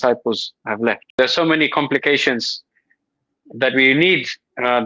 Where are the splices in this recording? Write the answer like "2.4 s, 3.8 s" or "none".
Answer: 1.2 s